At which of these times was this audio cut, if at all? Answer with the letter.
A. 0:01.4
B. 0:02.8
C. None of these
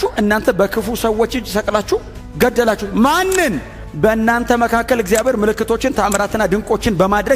B